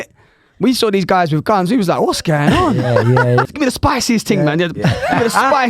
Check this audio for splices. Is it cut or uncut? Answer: cut